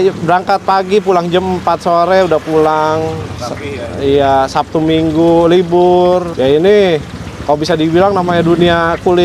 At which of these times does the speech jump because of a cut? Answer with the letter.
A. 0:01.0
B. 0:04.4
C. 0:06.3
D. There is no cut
C